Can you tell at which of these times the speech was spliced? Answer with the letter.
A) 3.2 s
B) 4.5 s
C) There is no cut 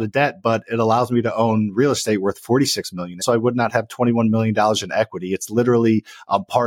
A